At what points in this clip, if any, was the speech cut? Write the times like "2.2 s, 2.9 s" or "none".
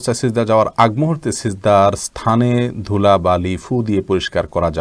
none